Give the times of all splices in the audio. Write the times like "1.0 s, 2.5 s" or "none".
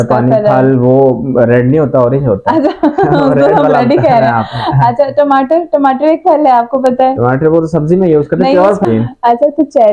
8.8 s